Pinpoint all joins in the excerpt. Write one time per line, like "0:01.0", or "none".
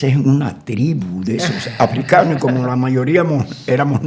none